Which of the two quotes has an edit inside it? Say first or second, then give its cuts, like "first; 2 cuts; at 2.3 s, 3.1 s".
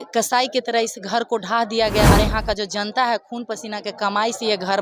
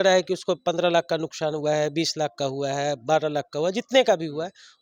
first; 1 cut; at 2.1 s